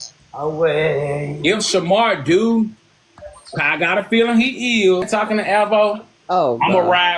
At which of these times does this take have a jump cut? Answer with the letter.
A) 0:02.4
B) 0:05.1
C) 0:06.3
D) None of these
B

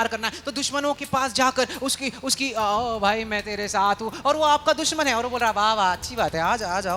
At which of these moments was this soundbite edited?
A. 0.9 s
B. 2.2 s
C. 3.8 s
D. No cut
D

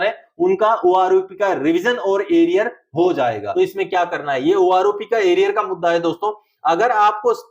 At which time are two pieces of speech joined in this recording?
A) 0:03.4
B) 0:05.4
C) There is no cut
A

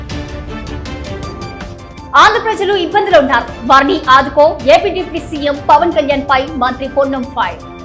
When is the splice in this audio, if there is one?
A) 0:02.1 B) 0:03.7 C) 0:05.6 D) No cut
A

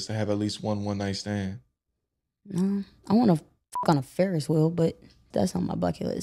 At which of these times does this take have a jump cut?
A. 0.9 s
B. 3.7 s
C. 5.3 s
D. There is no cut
C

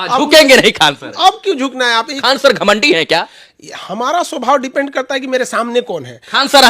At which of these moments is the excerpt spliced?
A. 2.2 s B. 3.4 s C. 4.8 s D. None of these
A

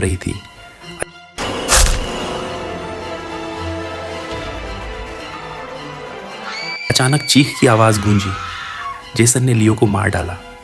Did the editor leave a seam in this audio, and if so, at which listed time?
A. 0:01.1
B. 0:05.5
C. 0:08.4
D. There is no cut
D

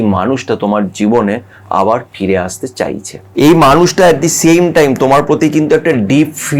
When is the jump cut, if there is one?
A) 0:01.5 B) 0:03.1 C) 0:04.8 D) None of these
B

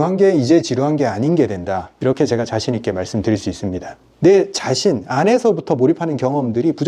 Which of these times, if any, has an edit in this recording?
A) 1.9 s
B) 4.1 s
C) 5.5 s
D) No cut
B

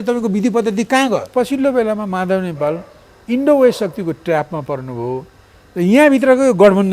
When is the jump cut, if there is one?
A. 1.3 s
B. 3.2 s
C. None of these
A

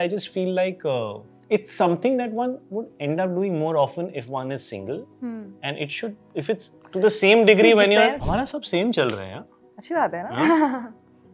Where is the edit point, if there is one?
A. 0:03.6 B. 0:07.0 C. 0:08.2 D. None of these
C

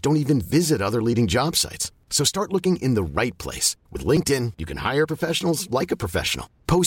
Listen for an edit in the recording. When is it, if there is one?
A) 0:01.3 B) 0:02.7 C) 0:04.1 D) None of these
D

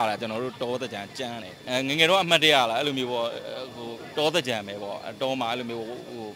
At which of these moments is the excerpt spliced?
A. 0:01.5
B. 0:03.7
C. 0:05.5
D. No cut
A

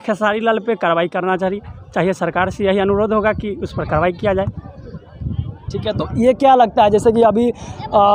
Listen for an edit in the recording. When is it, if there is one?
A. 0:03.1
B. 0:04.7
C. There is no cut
C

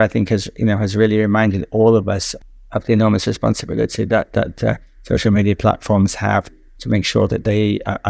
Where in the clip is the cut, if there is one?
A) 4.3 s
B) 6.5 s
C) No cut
C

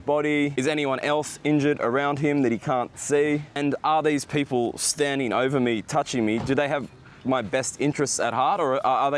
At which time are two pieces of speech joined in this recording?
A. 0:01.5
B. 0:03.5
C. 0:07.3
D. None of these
D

